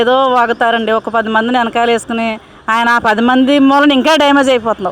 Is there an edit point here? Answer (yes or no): no